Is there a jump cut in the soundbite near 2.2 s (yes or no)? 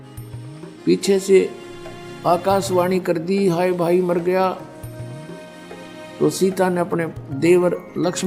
no